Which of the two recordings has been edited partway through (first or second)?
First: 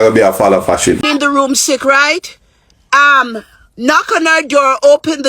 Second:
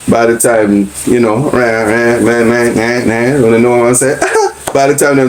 first